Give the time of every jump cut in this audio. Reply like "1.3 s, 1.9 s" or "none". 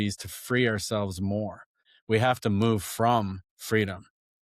1.9 s, 3.5 s